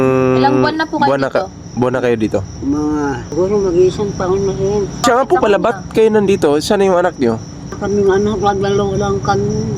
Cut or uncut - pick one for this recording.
cut